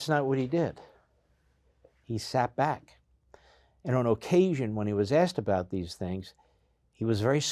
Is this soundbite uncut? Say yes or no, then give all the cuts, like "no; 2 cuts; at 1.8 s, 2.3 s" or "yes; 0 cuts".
yes; 0 cuts